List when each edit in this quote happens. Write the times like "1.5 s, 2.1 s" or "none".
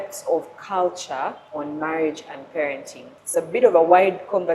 1.4 s, 3.2 s